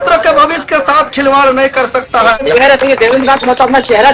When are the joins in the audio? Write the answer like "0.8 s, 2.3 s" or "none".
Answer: 2.4 s